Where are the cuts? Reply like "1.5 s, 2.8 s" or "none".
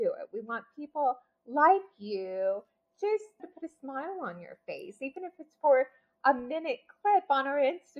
3.5 s

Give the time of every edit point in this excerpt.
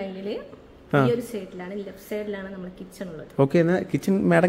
none

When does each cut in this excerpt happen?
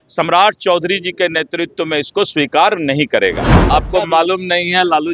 3.6 s

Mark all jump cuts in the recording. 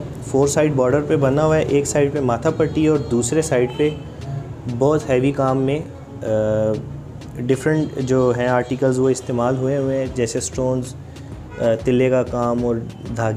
none

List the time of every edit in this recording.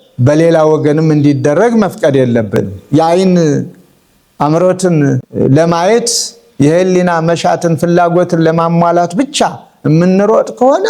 2.8 s, 5.3 s

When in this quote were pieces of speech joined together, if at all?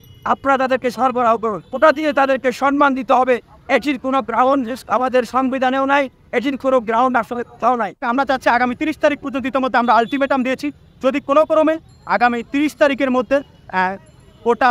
1.7 s, 8.0 s

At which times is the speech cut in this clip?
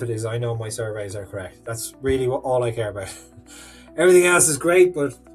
none

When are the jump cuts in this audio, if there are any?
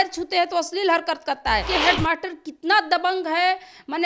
1.7 s

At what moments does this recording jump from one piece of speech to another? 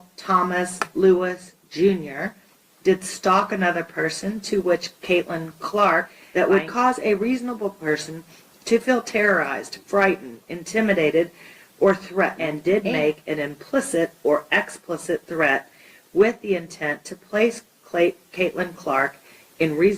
6.2 s, 12.5 s

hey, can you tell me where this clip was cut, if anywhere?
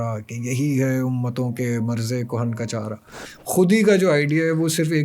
3.2 s

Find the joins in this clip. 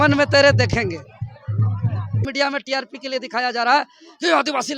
2.2 s

